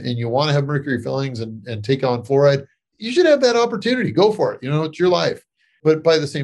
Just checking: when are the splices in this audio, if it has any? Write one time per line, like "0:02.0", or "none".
0:02.9